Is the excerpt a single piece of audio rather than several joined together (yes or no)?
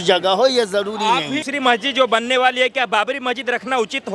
no